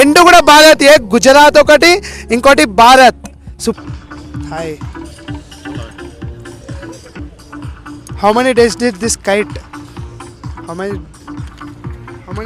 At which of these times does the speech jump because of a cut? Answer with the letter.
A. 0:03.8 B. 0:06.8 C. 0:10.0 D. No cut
A